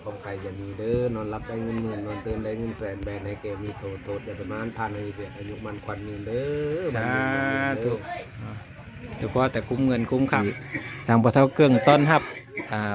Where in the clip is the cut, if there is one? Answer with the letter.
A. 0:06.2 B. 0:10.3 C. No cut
B